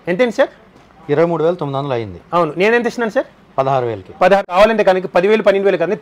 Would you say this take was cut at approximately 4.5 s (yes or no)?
yes